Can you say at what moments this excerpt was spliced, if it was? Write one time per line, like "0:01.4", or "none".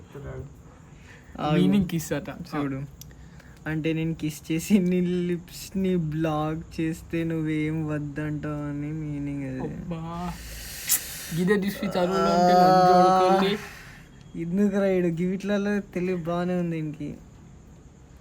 none